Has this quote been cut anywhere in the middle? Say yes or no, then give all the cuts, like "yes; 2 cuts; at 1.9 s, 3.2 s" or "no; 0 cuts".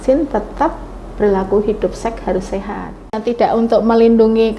yes; 1 cut; at 3.2 s